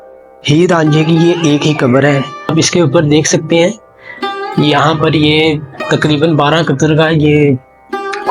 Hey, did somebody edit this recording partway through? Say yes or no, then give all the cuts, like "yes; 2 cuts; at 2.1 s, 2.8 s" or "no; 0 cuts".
yes; 1 cut; at 2.5 s